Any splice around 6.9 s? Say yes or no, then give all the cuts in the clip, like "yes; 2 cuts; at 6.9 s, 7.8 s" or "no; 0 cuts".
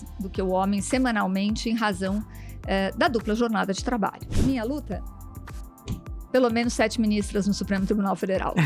no; 1 cut; at 4.3 s